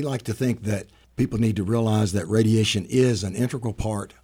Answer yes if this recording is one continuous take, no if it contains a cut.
yes